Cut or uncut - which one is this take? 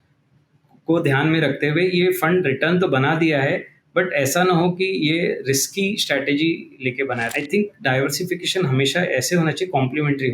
cut